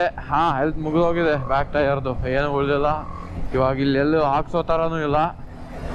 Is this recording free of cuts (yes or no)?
yes